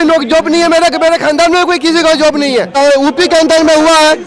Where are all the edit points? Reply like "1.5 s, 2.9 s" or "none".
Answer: 2.7 s